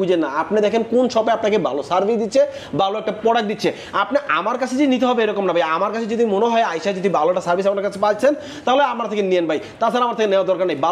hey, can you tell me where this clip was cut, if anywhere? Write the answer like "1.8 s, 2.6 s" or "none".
none